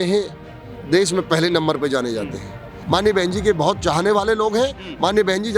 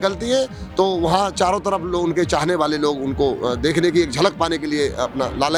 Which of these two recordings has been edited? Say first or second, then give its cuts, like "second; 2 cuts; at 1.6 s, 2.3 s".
first; 1 cut; at 2.8 s